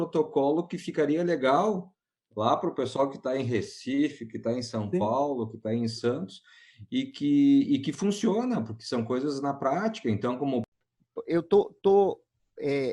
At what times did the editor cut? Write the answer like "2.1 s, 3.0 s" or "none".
10.7 s